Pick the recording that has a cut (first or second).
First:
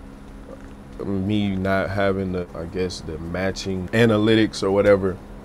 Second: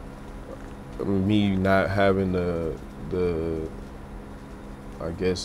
first